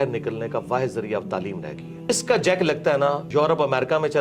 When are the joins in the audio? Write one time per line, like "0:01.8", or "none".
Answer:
0:02.1
0:03.2